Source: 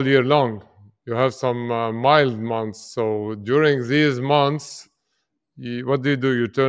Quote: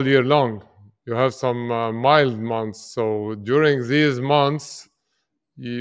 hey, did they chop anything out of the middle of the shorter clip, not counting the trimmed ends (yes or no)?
no